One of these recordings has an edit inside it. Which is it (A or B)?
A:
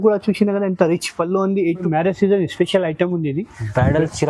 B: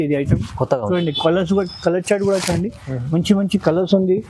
A